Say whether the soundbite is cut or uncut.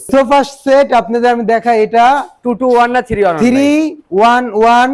uncut